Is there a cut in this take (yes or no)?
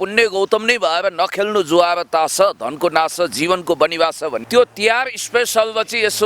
yes